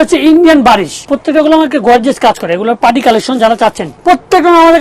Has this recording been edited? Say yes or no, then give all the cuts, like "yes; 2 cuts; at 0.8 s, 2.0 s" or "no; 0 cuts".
yes; 2 cuts; at 1.0 s, 4.0 s